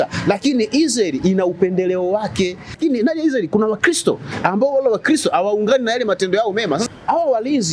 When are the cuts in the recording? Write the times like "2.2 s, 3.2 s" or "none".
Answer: 2.8 s, 6.8 s